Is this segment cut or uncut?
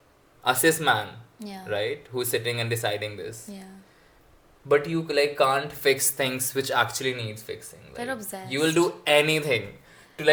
uncut